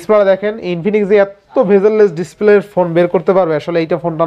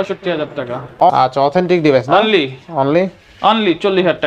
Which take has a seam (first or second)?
second